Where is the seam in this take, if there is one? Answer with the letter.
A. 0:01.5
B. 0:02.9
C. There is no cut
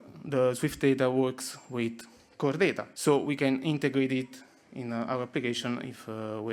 B